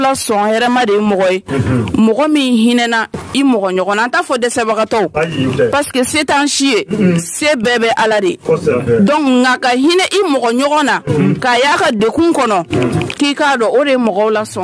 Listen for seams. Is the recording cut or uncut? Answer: uncut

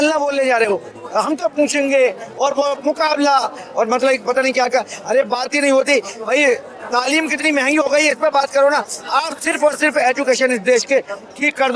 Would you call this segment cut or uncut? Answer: uncut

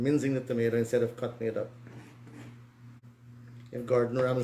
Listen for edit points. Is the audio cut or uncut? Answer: cut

